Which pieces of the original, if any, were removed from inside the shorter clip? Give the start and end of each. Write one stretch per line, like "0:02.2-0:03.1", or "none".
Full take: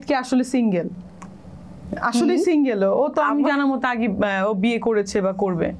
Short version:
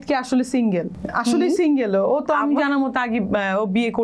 0:01.0-0:01.9